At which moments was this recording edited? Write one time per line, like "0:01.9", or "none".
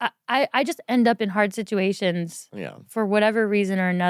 none